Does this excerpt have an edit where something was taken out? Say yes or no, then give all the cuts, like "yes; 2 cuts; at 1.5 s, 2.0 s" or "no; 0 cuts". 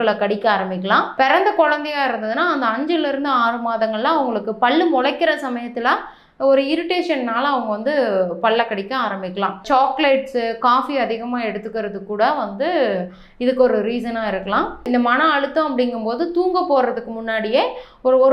yes; 3 cuts; at 1.1 s, 9.6 s, 14.8 s